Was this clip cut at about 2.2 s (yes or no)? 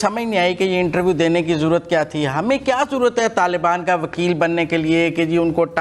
no